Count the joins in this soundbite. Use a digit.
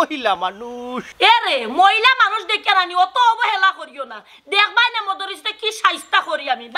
1